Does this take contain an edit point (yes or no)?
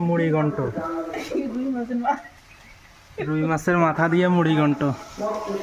no